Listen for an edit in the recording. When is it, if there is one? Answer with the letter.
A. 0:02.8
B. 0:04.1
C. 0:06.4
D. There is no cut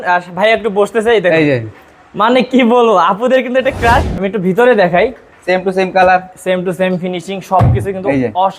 B